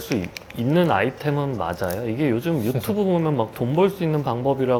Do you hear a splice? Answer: no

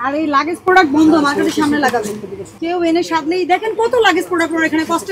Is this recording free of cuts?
yes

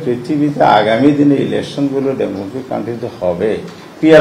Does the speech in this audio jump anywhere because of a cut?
no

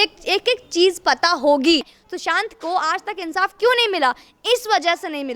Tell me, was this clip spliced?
yes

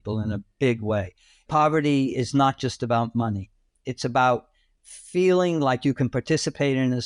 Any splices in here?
no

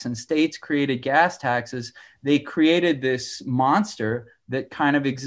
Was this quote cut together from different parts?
no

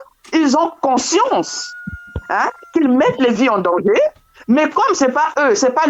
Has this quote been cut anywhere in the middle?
no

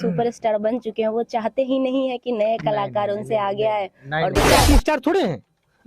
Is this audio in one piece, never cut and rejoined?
no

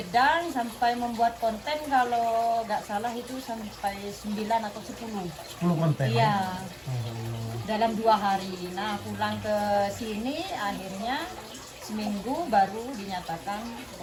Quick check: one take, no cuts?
yes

